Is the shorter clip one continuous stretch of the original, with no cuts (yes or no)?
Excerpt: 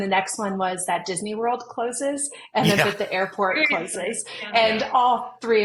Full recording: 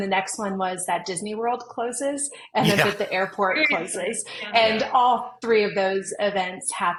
yes